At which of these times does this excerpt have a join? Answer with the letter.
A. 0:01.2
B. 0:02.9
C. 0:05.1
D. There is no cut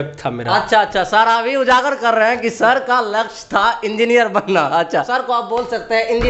C